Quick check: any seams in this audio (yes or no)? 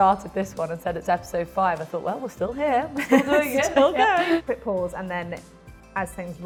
no